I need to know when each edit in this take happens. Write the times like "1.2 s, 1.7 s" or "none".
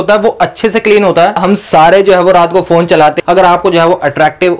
1.4 s, 3.2 s

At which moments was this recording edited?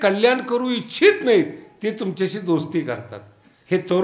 none

